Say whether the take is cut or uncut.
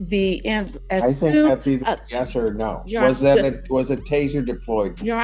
uncut